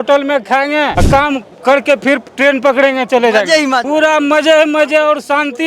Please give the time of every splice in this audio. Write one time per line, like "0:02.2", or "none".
0:01.0
0:03.8